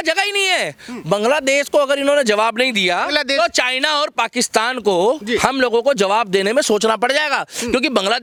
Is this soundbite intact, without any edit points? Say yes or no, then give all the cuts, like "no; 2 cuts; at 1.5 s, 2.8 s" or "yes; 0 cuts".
yes; 0 cuts